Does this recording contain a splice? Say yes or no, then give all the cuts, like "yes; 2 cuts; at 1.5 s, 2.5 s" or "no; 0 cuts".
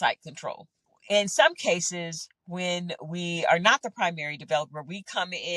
no; 0 cuts